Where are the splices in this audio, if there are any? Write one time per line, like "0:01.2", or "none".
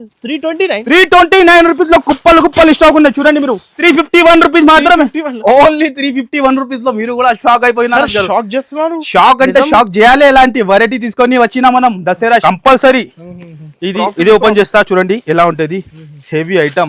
0:03.7
0:12.4